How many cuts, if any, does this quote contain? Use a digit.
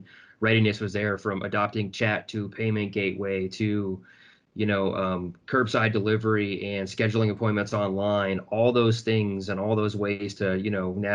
0